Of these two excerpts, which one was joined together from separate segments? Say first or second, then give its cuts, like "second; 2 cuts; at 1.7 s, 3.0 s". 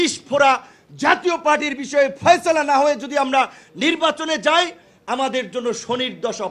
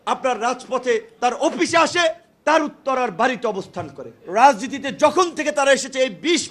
second; 1 cut; at 4.1 s